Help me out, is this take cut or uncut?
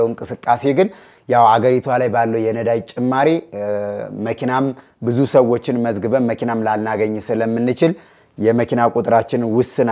uncut